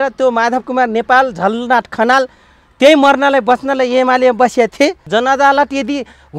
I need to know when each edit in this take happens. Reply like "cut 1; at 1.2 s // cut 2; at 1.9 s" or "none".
cut 1; at 5.0 s